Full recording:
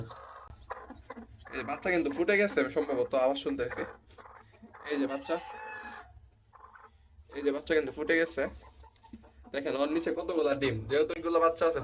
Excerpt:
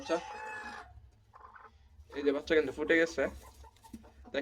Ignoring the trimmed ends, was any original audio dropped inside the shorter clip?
no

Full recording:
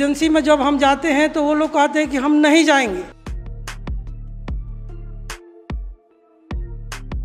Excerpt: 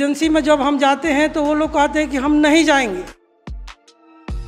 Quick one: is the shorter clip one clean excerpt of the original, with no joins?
no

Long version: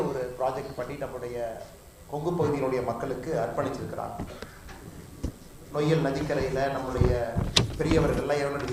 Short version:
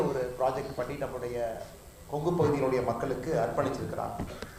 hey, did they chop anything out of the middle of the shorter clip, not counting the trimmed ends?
no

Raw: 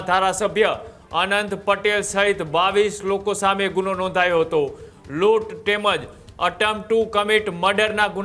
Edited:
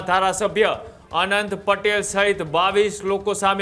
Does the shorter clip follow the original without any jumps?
yes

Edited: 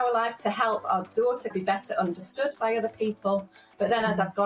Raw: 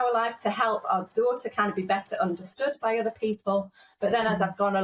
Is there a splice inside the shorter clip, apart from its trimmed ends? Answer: yes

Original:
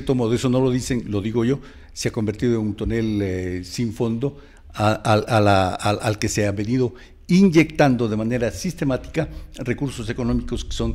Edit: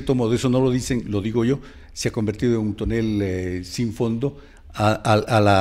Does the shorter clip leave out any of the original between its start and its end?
no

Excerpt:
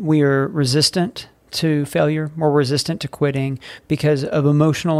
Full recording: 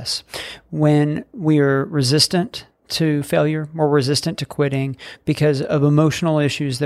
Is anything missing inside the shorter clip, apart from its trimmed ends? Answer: no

